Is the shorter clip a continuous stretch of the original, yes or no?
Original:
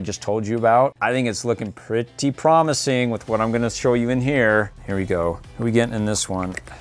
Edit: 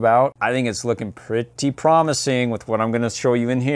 yes